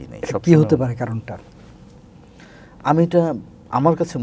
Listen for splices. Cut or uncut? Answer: uncut